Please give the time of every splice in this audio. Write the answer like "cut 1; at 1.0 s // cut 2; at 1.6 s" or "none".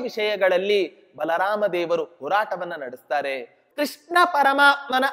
cut 1; at 3.6 s